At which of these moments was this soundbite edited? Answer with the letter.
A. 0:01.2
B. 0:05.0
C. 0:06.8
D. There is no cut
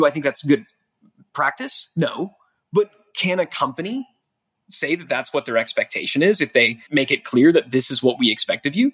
C